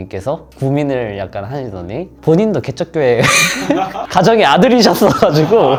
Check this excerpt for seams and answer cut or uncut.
uncut